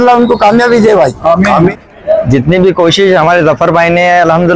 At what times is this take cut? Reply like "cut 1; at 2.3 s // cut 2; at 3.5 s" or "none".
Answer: cut 1; at 1.8 s